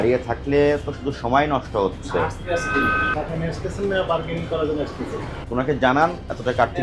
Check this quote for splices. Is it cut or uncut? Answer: uncut